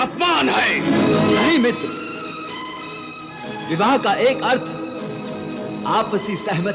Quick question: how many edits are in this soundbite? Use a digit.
1